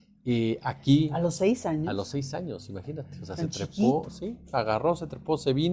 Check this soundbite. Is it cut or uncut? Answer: uncut